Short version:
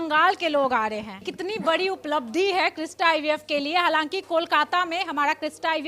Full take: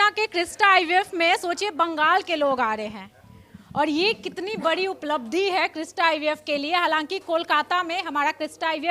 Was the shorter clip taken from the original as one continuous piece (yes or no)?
no